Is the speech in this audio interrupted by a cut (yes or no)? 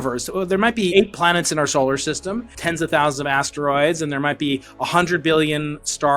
yes